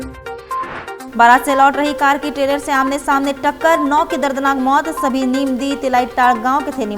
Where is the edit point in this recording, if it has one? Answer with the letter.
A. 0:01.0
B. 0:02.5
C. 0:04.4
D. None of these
A